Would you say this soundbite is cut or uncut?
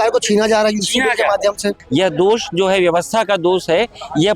cut